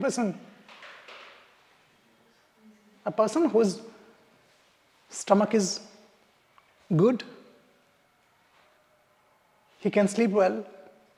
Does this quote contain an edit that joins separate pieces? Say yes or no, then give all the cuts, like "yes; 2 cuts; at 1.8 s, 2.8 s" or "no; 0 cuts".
no; 0 cuts